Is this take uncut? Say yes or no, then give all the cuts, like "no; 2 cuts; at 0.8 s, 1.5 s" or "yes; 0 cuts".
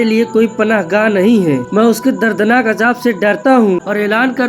no; 1 cut; at 3.5 s